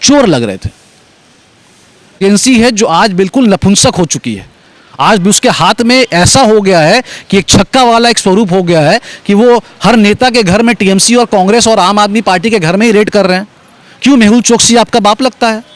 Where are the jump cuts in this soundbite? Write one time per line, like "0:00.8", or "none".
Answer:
0:02.2

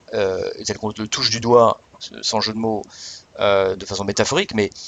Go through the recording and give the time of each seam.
none

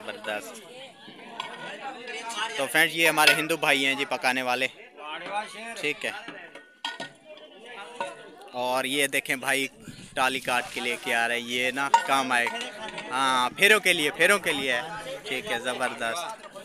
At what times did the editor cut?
none

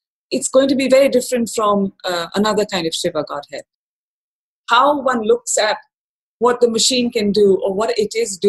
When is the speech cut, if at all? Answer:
0:04.1

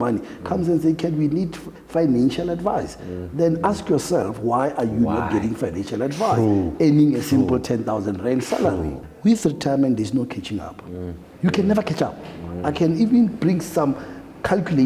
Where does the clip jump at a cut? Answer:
0:09.0

